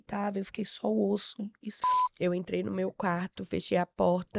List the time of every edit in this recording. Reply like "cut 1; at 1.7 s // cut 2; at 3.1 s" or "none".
cut 1; at 1.7 s